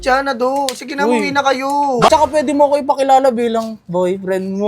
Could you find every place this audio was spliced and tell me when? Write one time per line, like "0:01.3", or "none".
0:02.1